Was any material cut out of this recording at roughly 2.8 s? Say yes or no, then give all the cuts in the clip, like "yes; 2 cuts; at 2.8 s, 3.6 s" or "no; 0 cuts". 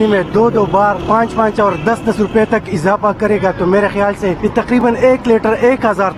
no; 2 cuts; at 1.0 s, 4.8 s